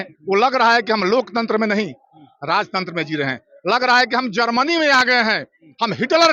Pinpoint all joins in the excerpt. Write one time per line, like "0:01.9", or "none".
none